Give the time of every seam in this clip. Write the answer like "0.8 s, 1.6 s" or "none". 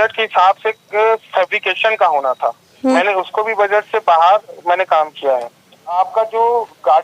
3.0 s, 5.9 s